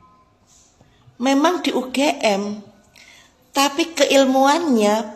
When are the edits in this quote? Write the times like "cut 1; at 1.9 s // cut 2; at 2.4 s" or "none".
none